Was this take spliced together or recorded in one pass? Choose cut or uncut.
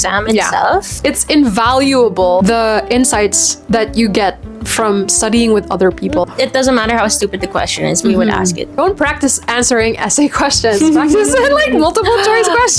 cut